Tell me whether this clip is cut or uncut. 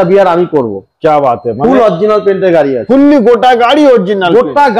uncut